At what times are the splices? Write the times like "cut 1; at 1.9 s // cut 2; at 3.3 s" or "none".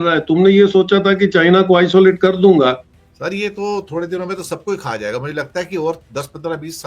cut 1; at 2.9 s